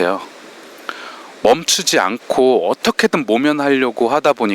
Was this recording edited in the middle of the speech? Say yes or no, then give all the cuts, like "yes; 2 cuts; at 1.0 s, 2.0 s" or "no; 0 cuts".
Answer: no; 0 cuts